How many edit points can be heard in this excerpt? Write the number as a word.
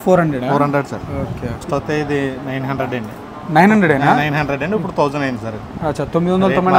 one